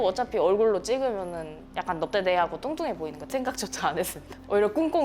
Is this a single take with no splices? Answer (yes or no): no